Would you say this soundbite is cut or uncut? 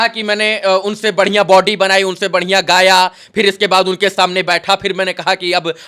uncut